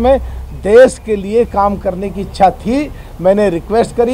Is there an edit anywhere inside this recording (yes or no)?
no